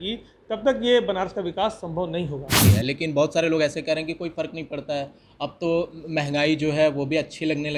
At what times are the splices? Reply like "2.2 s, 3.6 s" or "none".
2.7 s